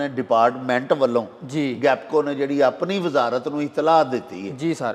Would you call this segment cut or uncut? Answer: uncut